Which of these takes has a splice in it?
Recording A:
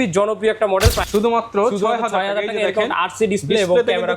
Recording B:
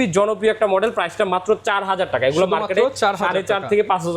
A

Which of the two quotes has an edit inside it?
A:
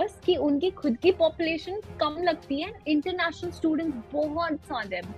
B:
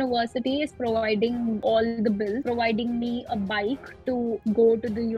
B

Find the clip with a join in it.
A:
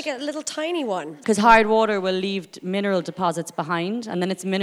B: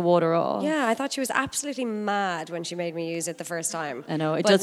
A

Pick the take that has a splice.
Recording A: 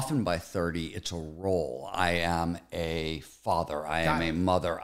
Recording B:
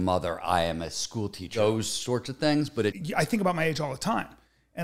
B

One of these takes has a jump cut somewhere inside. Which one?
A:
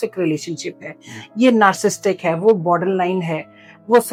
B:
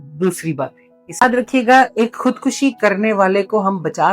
B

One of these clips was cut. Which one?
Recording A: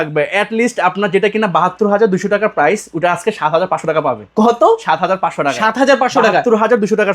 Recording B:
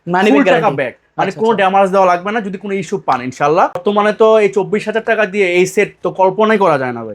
B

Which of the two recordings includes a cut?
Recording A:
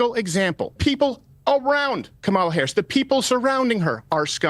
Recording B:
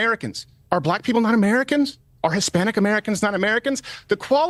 A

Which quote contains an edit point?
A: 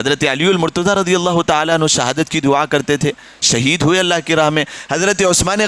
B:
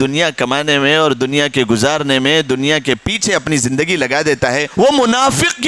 B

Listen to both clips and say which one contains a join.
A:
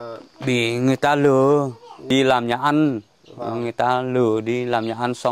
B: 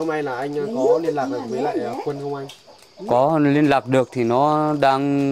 A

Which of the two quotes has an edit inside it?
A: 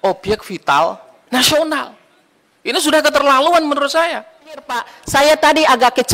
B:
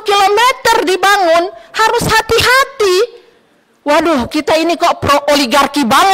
A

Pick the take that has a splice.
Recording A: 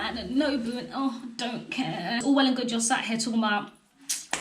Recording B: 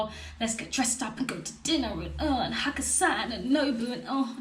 A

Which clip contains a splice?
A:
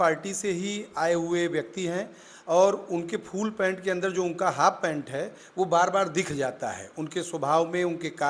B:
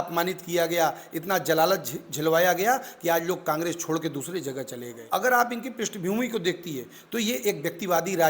B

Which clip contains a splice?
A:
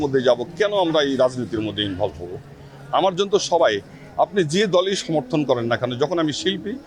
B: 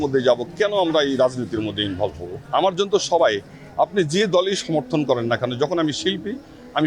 B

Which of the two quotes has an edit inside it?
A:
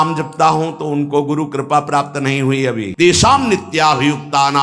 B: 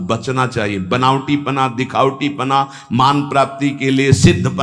A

